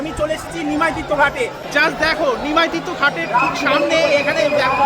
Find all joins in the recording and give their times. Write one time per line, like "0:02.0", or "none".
0:01.6